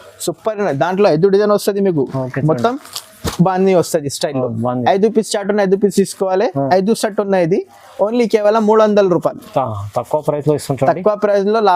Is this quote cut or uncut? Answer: uncut